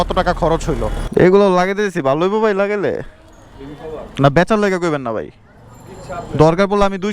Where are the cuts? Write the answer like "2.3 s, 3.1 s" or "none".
0.9 s